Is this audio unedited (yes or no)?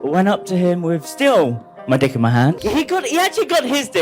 no